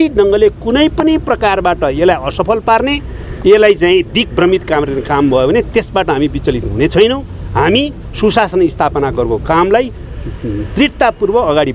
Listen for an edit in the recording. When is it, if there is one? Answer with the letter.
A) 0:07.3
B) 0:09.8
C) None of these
C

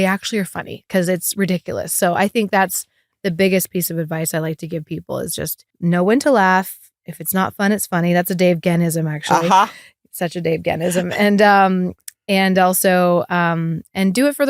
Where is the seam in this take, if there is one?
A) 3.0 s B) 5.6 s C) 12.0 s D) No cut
B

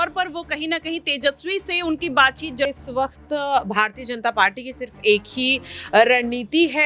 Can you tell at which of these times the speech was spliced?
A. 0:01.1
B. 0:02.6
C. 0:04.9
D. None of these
B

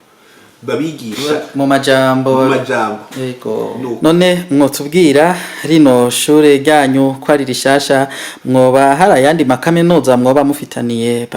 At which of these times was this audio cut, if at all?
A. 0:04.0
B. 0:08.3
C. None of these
A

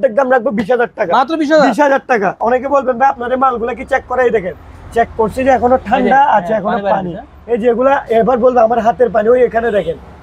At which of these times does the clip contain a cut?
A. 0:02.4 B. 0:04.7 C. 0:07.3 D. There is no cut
A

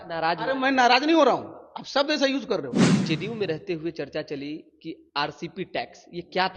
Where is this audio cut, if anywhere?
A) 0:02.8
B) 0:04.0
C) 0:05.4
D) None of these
A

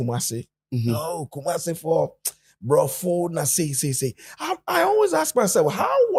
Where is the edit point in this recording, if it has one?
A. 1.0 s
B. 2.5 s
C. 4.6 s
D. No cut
D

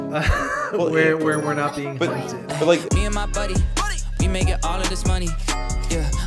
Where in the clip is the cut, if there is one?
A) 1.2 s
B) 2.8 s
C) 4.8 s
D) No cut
B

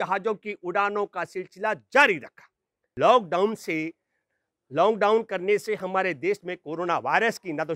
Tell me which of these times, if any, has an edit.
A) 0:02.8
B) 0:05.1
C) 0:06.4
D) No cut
A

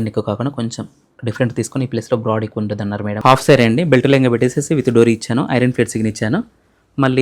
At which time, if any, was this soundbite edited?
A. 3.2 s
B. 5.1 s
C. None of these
A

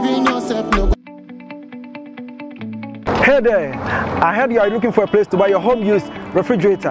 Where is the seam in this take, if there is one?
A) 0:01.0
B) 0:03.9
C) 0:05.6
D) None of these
A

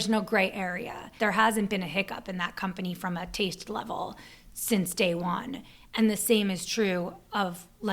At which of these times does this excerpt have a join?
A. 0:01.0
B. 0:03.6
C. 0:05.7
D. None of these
A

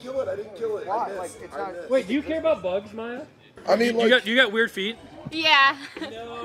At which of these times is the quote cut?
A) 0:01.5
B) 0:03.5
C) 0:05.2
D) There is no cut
B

